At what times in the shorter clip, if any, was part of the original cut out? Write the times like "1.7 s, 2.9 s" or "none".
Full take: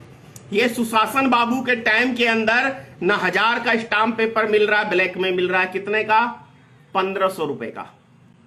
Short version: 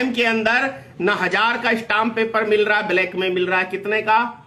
none